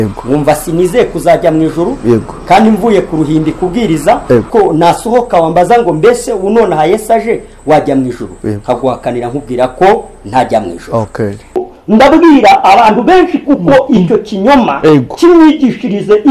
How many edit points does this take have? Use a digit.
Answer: 2